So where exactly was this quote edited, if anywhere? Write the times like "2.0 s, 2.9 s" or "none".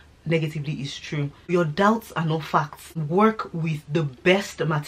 1.5 s, 3.0 s